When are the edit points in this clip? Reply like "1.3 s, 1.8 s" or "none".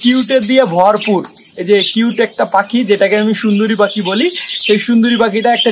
none